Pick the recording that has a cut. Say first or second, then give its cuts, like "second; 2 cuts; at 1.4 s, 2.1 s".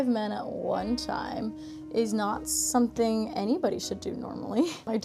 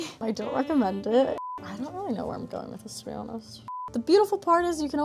second; 2 cuts; at 1.4 s, 3.6 s